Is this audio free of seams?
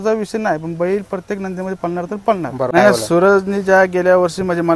no; 1 cut; at 2.7 s

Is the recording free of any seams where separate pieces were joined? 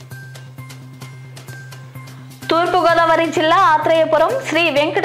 no; 2 cuts; at 0.9 s, 2.5 s

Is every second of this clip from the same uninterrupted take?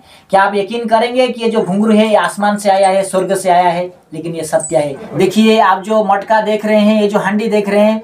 no; 1 cut; at 5.0 s

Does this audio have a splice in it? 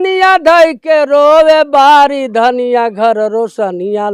no; 0 cuts

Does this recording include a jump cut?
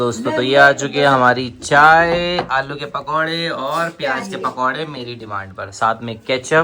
no; 0 cuts

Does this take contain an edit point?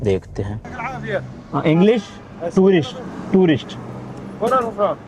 yes; 1 cut; at 1.0 s

